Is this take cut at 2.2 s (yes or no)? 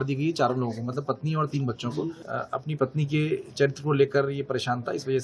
yes